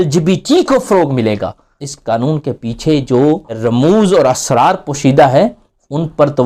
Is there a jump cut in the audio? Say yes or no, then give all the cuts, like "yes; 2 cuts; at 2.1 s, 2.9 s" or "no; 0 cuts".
no; 0 cuts